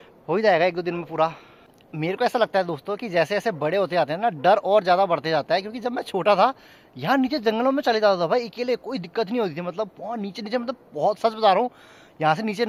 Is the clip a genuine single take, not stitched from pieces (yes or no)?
yes